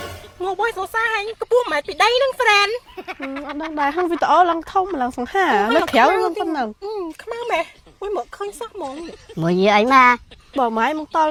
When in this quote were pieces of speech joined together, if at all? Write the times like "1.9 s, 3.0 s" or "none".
none